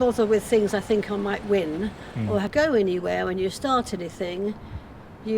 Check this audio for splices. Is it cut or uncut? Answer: cut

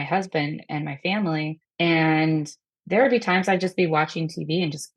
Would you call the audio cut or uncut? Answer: cut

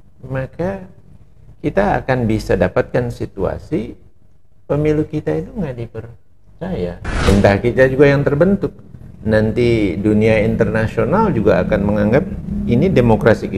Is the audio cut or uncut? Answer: cut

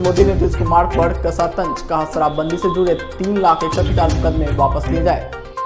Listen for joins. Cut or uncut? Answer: uncut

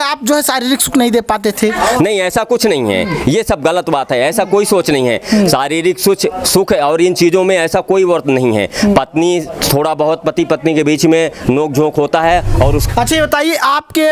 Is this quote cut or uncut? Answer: cut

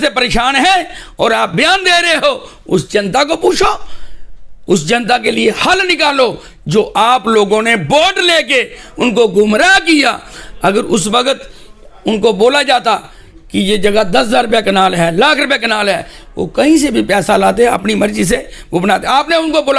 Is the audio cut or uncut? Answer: uncut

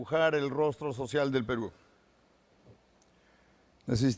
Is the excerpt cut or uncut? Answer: cut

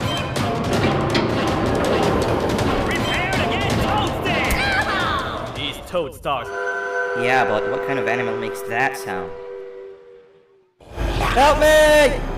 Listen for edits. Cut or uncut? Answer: cut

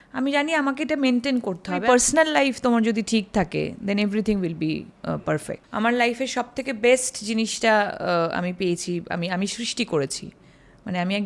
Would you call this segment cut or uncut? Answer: cut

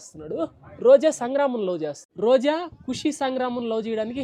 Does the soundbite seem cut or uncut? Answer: uncut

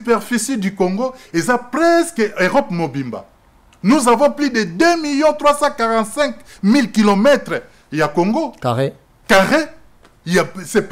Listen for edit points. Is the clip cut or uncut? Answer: uncut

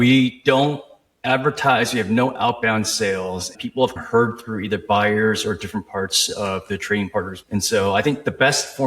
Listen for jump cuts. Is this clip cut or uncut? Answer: cut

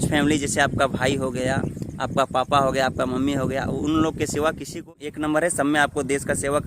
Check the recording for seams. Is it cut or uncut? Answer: cut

